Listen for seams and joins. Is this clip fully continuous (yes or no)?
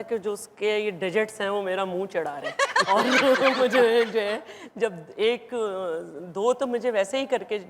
yes